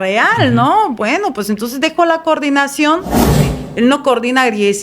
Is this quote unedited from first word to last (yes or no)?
no